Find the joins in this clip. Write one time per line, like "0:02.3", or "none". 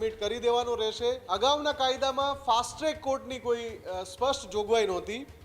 0:01.2